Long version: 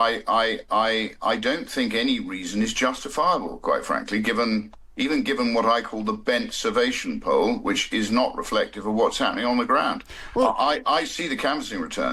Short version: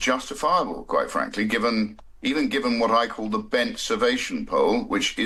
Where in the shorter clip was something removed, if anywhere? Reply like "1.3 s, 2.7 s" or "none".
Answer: none